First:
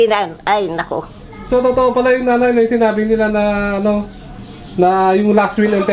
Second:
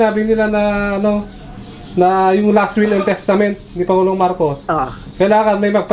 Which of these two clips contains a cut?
first; 1 cut; at 1.4 s

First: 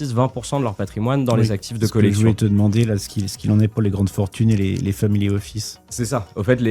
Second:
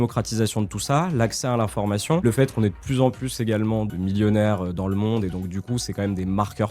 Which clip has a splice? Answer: second; 2 cuts; at 2.2 s, 3.9 s

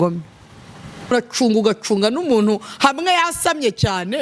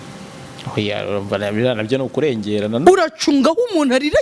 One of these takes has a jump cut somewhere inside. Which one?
first; 1 cut; at 1.1 s

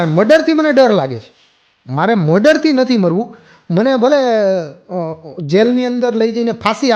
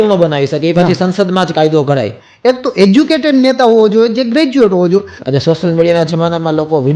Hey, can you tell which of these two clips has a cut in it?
second; 2 cuts; at 2.1 s, 5.2 s

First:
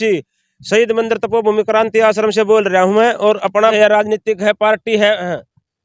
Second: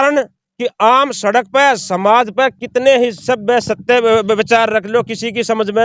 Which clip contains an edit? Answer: first; 1 cut; at 3.7 s

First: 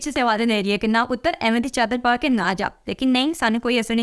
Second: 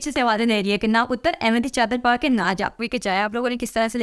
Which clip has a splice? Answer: second; 1 cut; at 2.8 s

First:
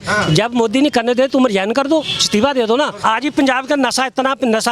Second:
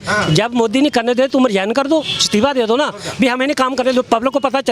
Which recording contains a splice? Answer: first; 1 cut; at 3.0 s

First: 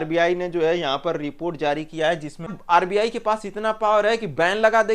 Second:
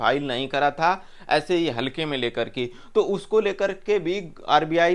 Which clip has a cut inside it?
first; 1 cut; at 2.5 s

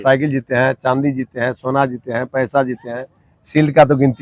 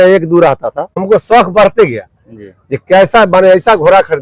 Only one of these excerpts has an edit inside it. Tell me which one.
second; 1 cut; at 1.0 s

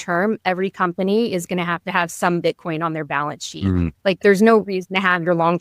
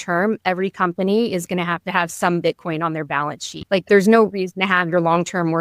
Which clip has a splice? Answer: second; 1 cut; at 3.6 s

